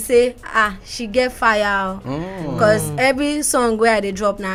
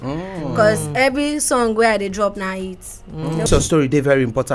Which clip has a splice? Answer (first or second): second